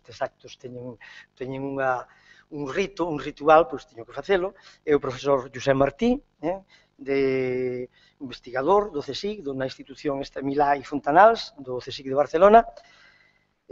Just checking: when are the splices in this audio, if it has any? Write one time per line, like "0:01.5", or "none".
0:08.2